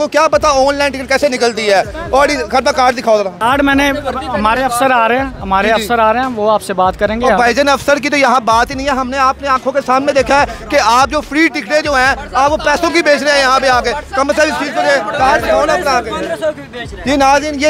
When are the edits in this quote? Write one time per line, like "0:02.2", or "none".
0:03.3